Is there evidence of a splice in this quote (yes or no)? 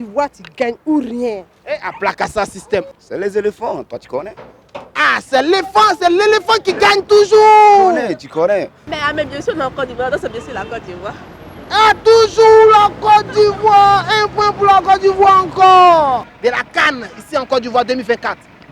yes